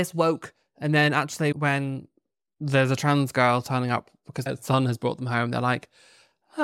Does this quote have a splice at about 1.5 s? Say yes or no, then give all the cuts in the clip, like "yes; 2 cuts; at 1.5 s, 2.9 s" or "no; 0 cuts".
yes; 2 cuts; at 1.5 s, 4.5 s